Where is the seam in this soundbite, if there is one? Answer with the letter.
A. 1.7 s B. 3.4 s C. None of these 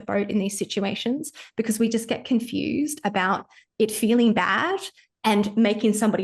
C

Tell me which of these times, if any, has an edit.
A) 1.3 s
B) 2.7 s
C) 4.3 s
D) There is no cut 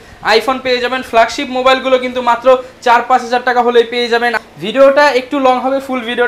C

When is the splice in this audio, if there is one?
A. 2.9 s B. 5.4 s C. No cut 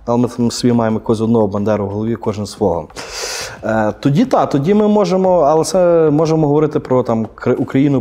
C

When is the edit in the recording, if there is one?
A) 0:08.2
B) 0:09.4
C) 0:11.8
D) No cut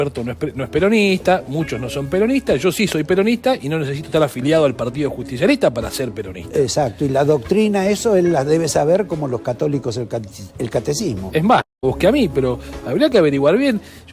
C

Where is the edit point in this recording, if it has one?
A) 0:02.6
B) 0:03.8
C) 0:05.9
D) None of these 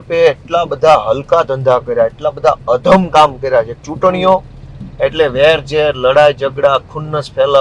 D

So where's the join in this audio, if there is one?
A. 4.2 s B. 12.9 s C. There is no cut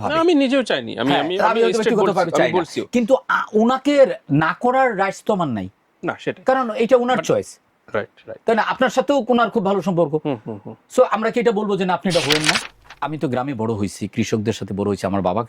B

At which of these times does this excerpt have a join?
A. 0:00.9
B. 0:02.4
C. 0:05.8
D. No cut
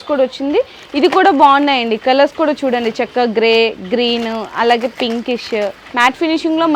C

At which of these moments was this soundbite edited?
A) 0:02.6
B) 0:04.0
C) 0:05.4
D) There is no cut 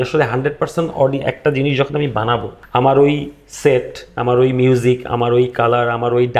A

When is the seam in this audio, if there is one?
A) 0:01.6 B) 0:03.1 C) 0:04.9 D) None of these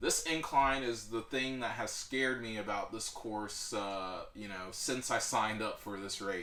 D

